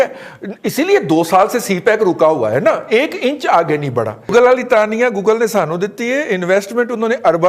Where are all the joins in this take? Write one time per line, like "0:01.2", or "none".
0:04.3

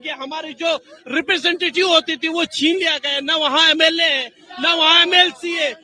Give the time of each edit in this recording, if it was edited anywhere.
none

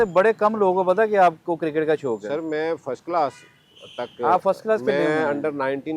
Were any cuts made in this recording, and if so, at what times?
none

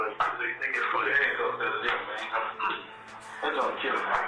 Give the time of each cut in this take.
none

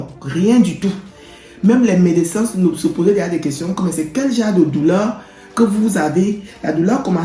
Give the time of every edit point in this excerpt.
none

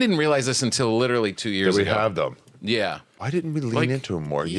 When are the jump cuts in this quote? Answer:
0:03.1

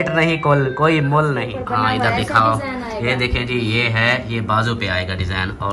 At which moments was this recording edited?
0:01.5

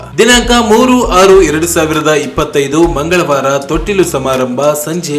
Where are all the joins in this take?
none

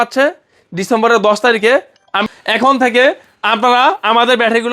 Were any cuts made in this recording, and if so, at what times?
0:02.2

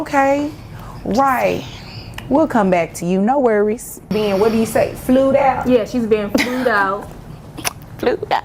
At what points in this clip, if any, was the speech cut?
0:04.1

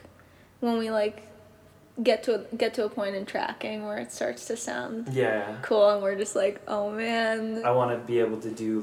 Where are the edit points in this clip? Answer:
0:07.6

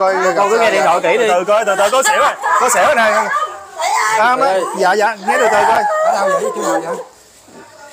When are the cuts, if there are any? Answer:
none

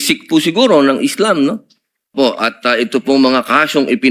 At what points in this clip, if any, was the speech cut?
0:02.1

